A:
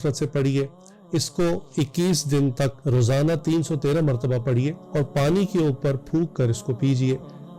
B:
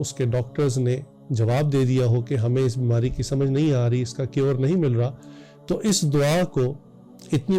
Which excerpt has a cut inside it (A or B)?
A